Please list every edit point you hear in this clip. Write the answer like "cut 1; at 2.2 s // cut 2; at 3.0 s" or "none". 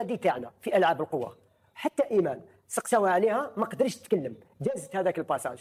none